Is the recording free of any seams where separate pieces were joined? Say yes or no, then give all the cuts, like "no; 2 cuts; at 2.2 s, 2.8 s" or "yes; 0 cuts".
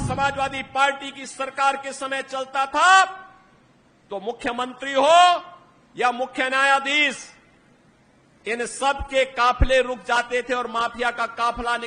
yes; 0 cuts